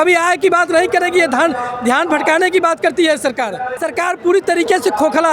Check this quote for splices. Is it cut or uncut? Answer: cut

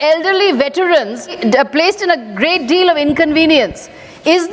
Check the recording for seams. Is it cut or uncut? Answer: cut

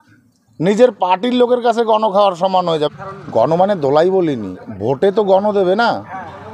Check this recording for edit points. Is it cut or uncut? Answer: cut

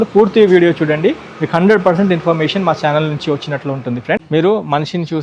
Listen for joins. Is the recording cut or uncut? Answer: cut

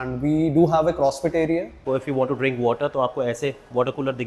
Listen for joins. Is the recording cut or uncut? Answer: cut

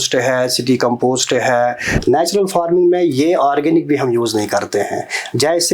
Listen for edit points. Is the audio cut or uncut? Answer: cut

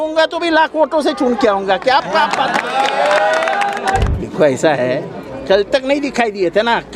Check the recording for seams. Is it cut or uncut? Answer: cut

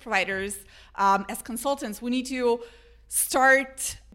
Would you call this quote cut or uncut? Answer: uncut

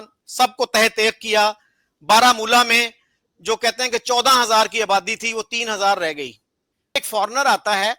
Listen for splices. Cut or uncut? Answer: cut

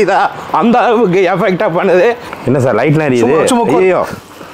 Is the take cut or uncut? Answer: cut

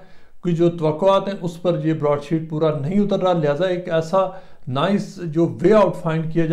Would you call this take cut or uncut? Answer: uncut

